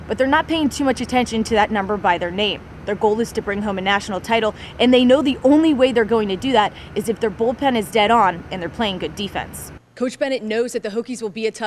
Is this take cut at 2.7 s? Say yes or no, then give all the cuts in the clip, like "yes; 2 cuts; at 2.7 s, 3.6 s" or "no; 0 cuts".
no; 1 cut; at 9.8 s